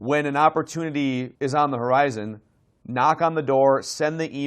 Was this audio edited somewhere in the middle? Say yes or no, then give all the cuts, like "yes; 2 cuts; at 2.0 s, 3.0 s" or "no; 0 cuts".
yes; 1 cut; at 1.3 s